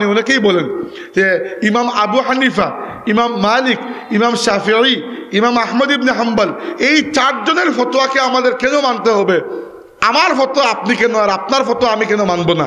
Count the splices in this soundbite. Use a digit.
0